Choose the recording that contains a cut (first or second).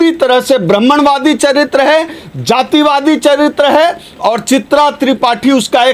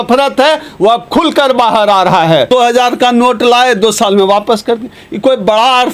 second